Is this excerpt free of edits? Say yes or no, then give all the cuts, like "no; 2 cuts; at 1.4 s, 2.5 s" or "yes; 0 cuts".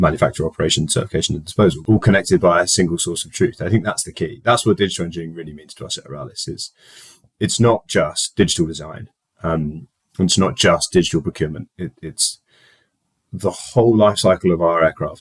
no; 1 cut; at 1.8 s